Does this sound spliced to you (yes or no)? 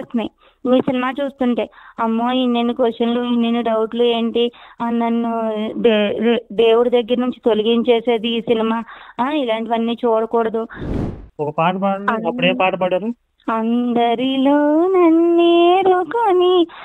yes